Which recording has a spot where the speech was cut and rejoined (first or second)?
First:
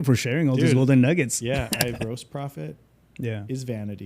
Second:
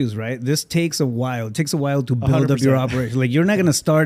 first